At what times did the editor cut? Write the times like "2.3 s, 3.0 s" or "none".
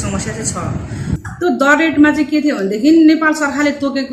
1.2 s